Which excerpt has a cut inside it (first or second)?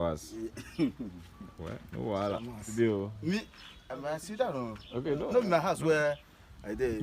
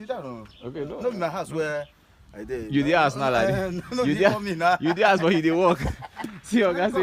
first